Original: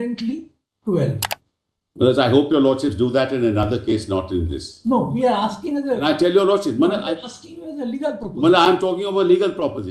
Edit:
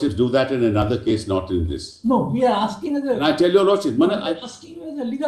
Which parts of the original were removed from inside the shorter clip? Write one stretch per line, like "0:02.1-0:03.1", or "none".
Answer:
none